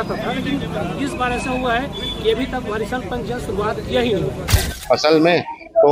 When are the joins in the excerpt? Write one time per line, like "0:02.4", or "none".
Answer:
0:04.6